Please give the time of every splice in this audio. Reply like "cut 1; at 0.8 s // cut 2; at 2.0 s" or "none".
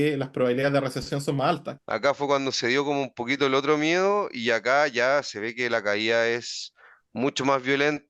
cut 1; at 1.7 s